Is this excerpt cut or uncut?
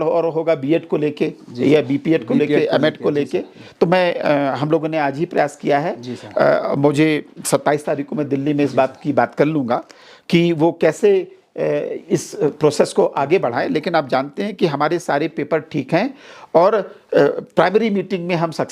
uncut